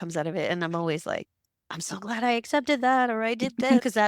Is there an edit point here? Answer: no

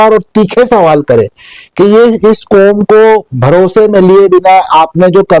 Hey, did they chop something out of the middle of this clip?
no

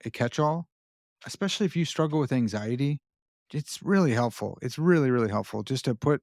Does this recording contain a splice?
yes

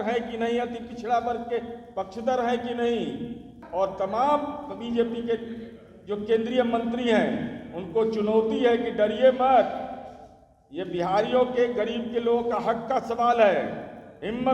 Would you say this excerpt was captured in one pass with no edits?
no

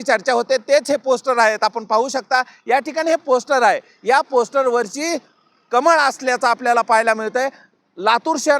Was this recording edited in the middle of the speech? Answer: no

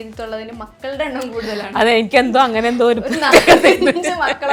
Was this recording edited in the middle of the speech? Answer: no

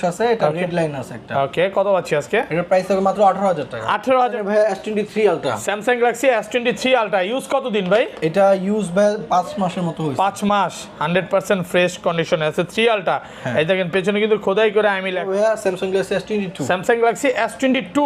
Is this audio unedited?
no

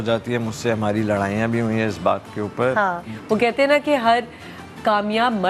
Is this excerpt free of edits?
no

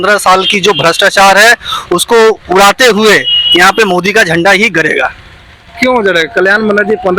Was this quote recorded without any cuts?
yes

